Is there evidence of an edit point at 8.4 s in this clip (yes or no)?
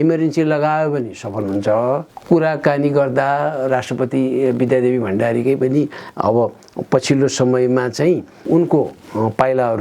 yes